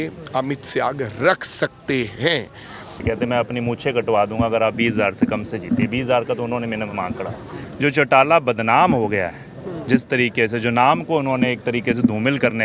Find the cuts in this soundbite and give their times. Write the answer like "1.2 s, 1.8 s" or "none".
3.0 s, 7.6 s